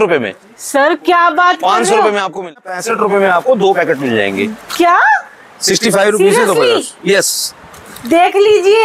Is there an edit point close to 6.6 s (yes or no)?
no